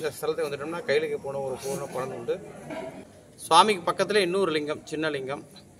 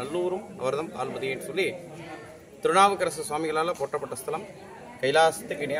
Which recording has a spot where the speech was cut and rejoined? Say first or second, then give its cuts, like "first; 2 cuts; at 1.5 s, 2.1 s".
first; 1 cut; at 3.0 s